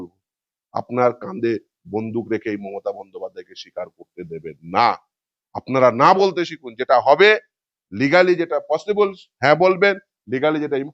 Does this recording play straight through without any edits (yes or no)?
yes